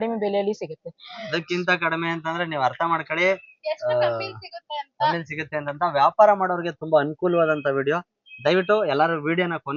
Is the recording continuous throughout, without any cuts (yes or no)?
yes